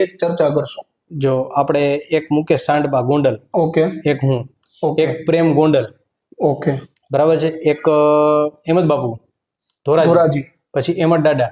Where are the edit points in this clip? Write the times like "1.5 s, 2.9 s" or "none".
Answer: none